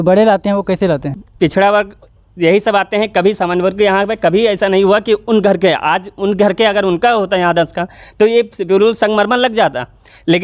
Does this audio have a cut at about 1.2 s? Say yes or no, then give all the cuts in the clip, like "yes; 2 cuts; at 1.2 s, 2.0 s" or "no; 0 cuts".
yes; 1 cut; at 1.2 s